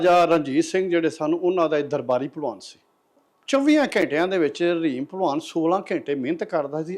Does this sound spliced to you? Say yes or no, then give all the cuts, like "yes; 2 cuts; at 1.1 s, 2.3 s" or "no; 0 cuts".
yes; 1 cut; at 3.1 s